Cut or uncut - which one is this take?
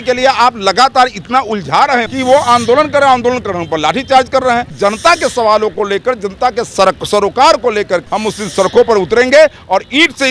cut